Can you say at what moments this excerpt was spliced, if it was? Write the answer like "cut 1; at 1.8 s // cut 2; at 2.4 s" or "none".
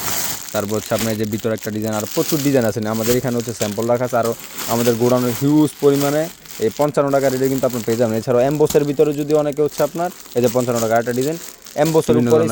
none